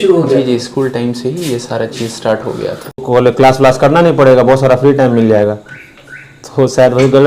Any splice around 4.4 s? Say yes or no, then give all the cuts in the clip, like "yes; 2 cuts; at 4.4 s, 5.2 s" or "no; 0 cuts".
no; 1 cut; at 3.1 s